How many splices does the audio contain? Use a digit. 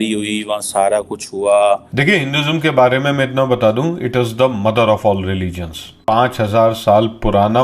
2